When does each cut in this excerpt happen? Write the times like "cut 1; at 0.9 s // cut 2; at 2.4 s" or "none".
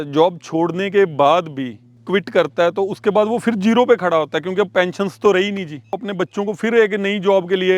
cut 1; at 2.0 s // cut 2; at 5.9 s

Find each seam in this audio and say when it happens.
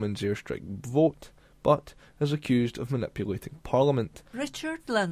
cut 1; at 4.2 s

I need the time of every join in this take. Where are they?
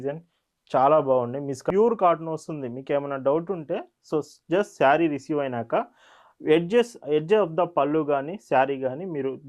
cut 1; at 1.6 s

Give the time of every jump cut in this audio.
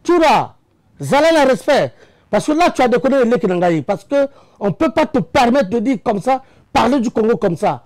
none

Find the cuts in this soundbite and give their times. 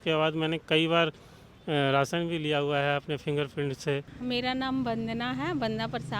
cut 1; at 4.1 s

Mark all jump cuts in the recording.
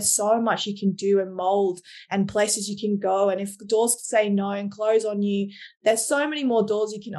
none

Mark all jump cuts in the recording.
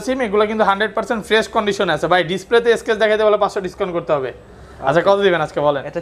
none

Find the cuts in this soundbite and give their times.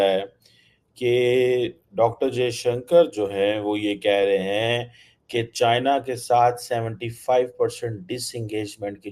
none

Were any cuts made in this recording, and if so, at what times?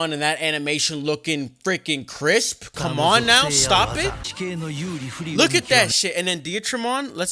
cut 1; at 4.2 s // cut 2; at 5.4 s

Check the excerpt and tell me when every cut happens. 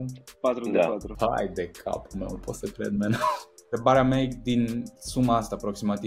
cut 1; at 1.1 s // cut 2; at 3.8 s

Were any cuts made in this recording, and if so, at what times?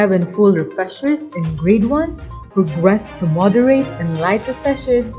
none

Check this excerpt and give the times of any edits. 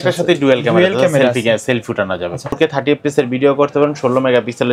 cut 1; at 2.6 s

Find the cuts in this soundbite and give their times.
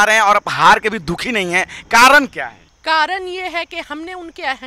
cut 1; at 2.6 s

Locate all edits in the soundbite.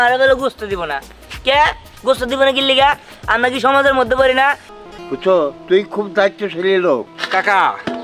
cut 1; at 4.7 s

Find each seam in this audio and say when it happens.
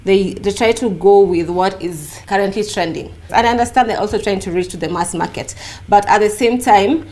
cut 1; at 2.1 s // cut 2; at 3.2 s

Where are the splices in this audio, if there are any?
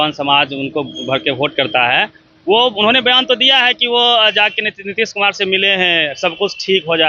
none

